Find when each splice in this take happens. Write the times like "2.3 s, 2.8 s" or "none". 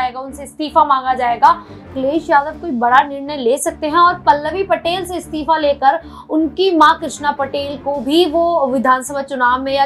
1.9 s